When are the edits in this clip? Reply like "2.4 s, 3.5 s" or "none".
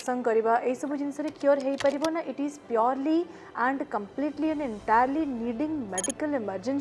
none